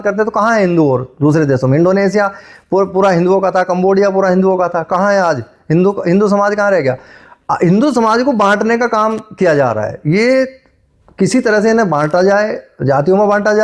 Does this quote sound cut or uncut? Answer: uncut